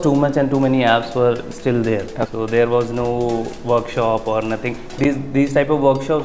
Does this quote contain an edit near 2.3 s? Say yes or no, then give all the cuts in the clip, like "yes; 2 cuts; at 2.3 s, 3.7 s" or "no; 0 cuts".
yes; 1 cut; at 2.3 s